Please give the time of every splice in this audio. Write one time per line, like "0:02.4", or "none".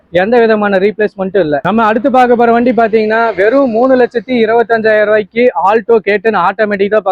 0:01.6